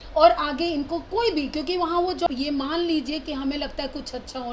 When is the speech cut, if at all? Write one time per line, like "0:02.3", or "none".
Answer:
0:02.3